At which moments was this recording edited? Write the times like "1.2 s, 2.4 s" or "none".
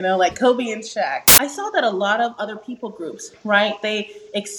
1.2 s